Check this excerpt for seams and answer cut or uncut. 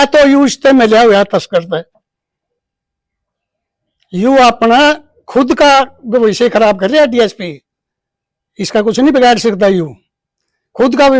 uncut